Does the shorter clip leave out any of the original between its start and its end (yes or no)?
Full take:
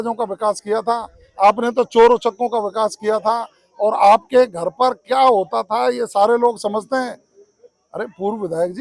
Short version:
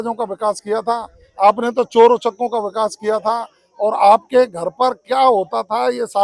no